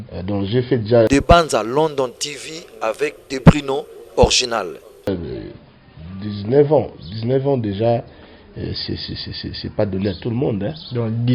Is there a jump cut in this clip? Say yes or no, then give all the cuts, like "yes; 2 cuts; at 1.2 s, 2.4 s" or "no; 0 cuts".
yes; 2 cuts; at 1.1 s, 5.1 s